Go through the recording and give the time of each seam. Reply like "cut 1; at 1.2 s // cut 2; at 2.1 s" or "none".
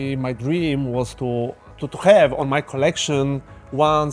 cut 1; at 1.7 s